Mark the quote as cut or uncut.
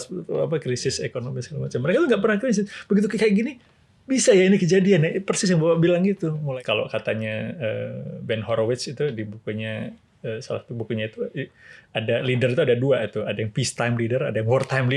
cut